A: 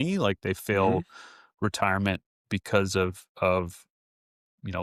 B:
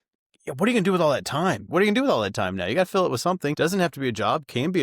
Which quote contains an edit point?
B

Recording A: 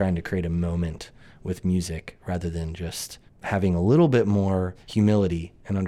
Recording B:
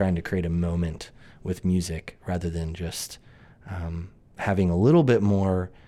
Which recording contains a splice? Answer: A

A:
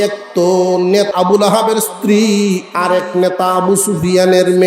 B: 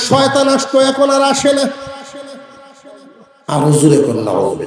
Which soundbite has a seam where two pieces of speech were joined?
A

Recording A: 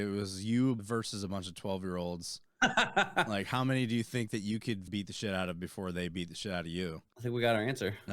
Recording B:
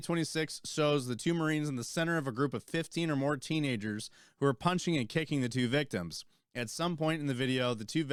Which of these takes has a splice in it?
A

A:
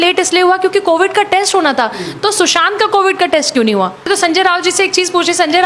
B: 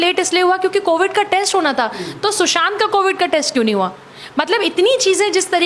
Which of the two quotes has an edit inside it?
A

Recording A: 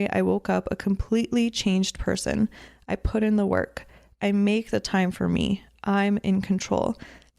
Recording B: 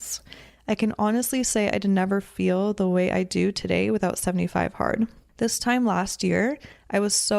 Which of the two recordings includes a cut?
B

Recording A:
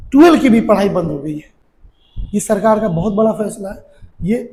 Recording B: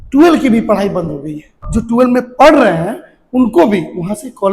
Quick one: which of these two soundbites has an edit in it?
B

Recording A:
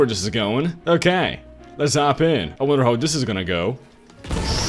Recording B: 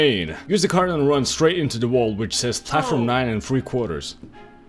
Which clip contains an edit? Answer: A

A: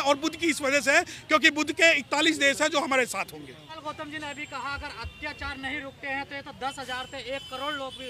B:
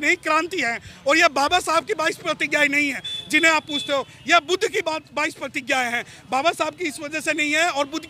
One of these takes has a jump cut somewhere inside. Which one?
A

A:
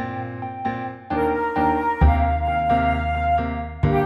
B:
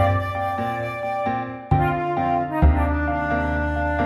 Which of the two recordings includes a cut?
A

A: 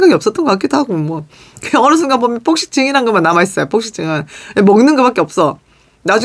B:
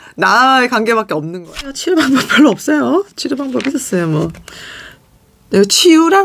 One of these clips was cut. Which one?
B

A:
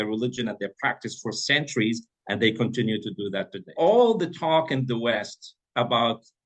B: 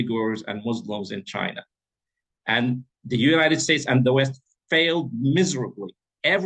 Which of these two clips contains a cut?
A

